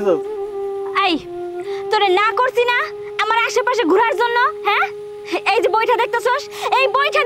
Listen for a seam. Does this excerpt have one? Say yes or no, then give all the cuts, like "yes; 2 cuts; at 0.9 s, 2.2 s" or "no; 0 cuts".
no; 0 cuts